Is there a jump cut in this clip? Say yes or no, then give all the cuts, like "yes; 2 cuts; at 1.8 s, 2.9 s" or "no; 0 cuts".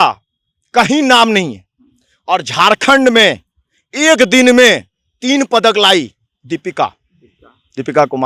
no; 0 cuts